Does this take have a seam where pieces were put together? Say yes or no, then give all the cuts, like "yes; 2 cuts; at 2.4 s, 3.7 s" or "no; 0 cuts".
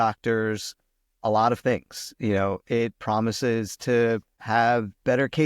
yes; 1 cut; at 4.4 s